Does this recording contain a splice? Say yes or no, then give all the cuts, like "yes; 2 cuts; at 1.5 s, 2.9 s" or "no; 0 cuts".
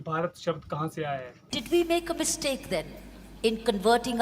yes; 1 cut; at 1.4 s